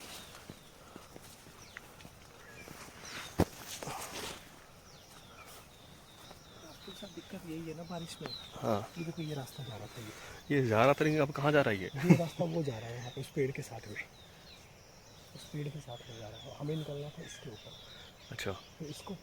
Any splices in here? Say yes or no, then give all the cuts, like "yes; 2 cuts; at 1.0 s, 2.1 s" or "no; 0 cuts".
no; 0 cuts